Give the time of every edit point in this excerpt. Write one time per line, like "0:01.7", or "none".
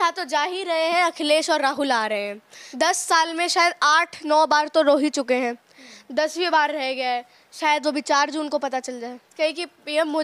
0:02.6
0:09.3

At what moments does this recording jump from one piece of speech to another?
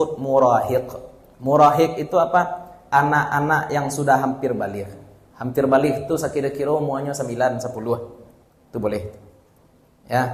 none

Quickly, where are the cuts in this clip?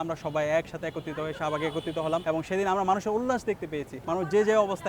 0:02.2
0:03.9

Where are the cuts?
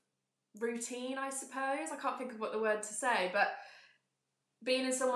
none

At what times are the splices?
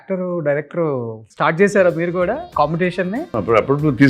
0:01.2
0:02.5
0:03.3

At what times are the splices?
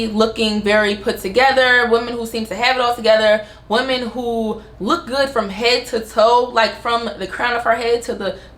none

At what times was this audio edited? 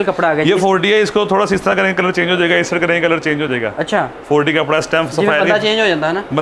none

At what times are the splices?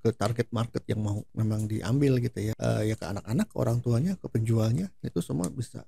0:01.2
0:02.5

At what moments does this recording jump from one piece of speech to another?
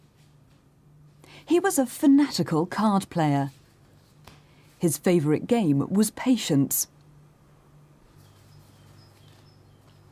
none

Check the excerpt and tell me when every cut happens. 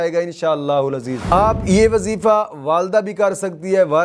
0:01.2

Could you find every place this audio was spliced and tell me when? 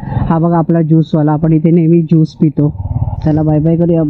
none

